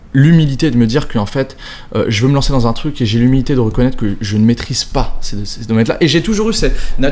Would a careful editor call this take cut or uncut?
uncut